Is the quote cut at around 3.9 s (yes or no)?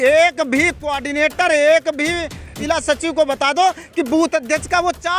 no